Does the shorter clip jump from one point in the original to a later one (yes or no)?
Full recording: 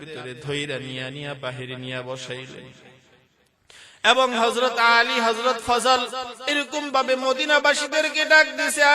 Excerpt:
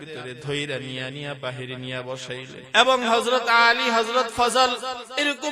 yes